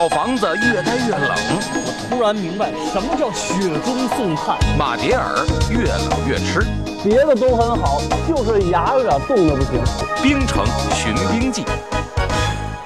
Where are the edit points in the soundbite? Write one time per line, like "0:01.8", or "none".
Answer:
0:10.0

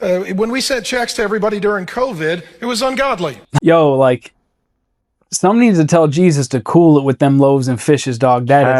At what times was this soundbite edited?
0:03.4

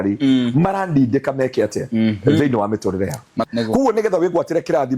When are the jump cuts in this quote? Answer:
0:03.4

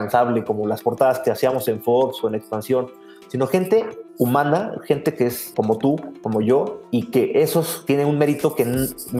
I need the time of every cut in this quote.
0:04.0
0:05.4
0:06.8
0:07.8

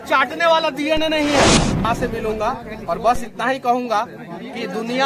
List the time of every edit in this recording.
0:01.9

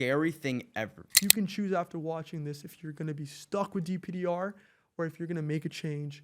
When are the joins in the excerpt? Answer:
0:01.0

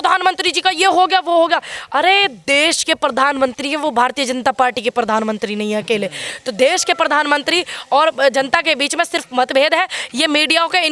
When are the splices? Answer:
none

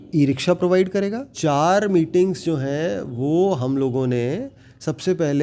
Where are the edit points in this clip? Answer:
0:01.3

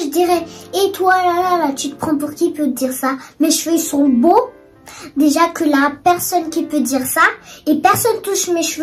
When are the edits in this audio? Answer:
none

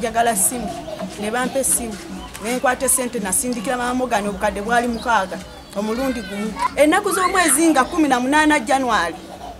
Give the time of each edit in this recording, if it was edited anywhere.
0:06.7

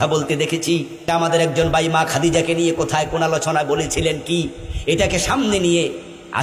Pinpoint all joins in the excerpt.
0:01.1

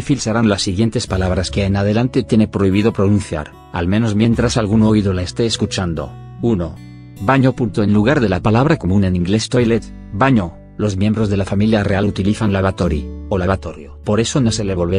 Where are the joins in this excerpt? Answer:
0:04.4

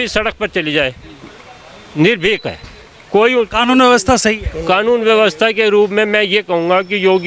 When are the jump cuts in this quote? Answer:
none

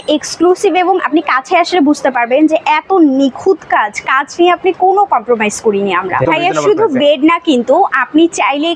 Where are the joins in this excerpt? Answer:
0:06.2

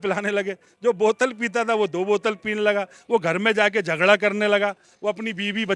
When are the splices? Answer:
none

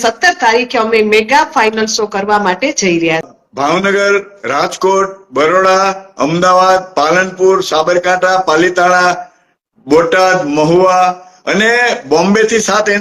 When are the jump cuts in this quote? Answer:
0:03.3

